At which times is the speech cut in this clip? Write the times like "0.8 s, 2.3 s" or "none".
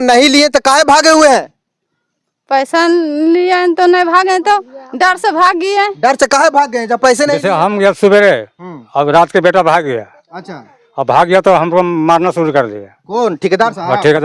7.5 s